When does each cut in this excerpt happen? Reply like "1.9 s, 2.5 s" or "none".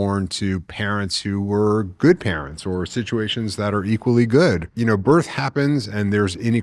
4.7 s